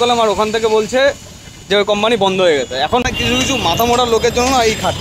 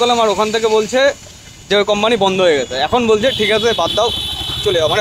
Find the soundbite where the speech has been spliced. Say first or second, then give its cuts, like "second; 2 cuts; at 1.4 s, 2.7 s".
first; 1 cut; at 3.0 s